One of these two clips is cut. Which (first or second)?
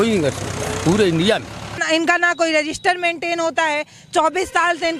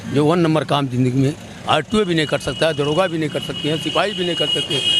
first